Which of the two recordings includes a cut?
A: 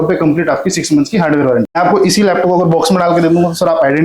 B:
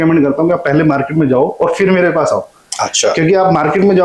A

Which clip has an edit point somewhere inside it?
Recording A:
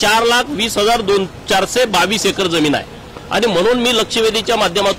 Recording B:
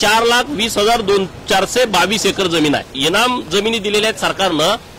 B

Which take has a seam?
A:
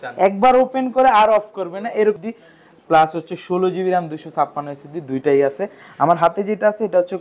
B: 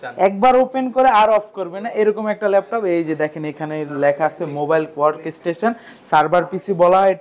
A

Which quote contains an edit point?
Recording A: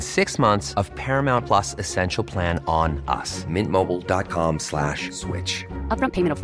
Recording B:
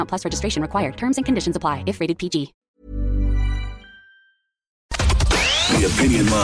B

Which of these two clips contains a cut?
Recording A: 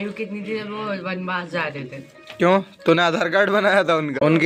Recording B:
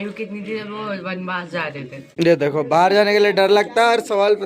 B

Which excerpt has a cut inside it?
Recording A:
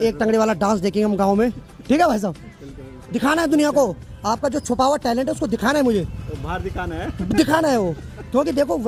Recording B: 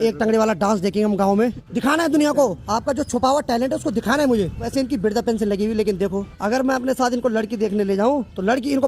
B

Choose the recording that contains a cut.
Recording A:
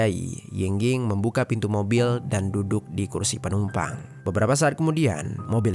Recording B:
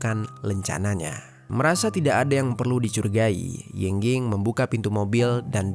B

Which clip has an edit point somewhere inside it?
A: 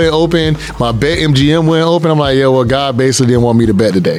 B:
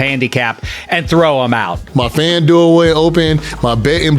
B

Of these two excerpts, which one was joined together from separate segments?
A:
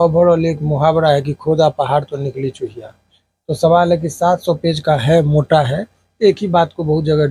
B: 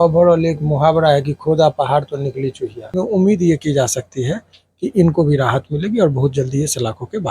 B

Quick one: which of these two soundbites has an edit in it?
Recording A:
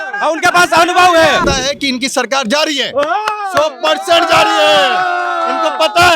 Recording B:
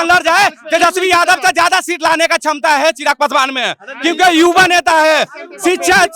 A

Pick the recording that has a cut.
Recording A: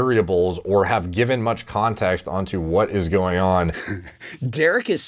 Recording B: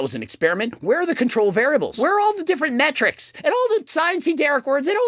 B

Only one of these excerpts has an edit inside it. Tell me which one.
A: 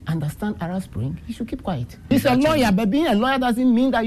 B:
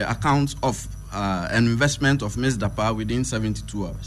A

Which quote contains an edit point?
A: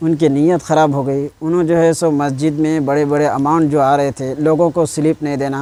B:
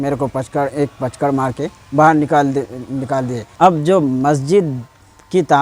B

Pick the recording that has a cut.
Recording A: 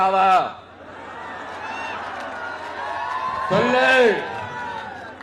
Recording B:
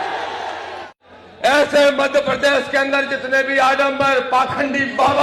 B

